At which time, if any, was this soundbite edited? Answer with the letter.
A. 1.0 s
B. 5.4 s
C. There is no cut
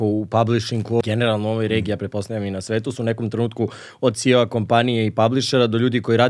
A